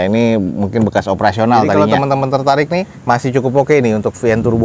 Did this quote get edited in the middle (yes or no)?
yes